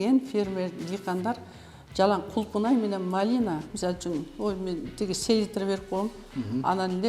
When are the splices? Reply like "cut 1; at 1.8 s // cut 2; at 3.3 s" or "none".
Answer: cut 1; at 3.7 s

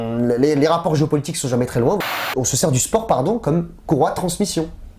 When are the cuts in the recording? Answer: cut 1; at 2.0 s

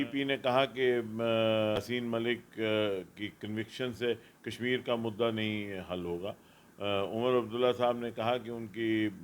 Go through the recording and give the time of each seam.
cut 1; at 1.8 s

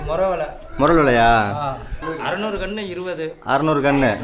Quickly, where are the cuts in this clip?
cut 1; at 2.2 s

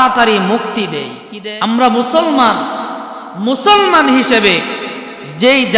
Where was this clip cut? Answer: cut 1; at 1.2 s

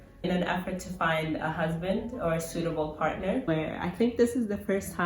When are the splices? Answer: cut 1; at 3.5 s

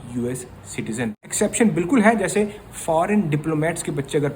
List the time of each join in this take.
cut 1; at 1.2 s

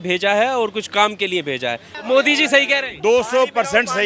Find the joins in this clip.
cut 1; at 1.9 s

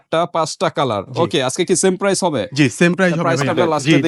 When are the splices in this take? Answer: none

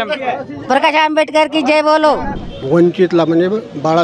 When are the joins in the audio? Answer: cut 1; at 2.4 s

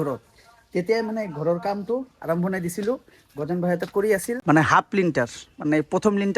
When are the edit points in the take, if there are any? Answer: cut 1; at 4.3 s

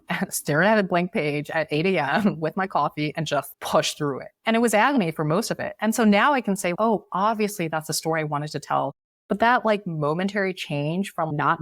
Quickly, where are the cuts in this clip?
none

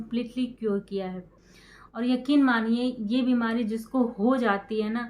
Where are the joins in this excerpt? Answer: cut 1; at 1.3 s

